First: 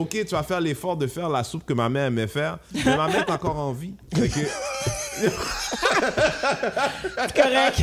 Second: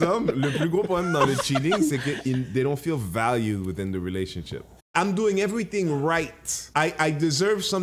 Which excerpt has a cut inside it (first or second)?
second